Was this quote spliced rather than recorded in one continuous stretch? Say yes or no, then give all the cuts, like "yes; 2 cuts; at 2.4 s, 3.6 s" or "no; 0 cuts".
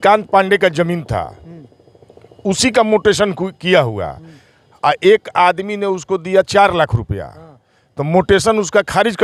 no; 0 cuts